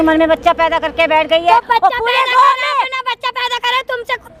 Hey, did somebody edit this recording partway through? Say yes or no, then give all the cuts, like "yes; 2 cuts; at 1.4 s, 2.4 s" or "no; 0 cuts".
no; 0 cuts